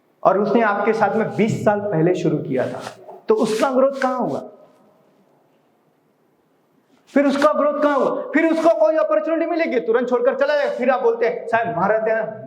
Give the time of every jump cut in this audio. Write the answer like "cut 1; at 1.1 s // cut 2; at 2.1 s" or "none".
none